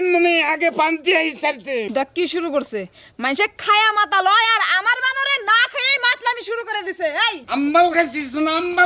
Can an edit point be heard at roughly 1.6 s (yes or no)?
no